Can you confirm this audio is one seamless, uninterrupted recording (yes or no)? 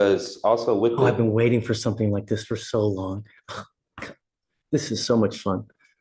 yes